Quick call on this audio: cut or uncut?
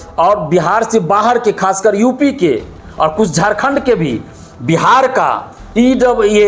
uncut